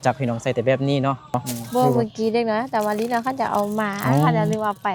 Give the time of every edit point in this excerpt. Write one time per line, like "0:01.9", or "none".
0:01.5